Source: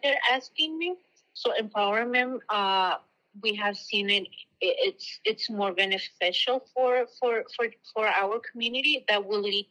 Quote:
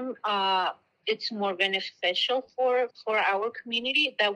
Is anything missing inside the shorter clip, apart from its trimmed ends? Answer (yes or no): yes